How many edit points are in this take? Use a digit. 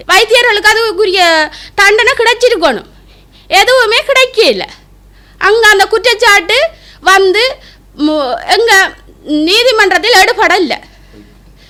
0